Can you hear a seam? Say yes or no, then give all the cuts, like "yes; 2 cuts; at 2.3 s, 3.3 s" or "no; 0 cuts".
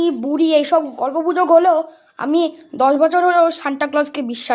no; 0 cuts